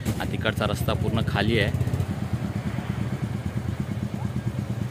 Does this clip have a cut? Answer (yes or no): yes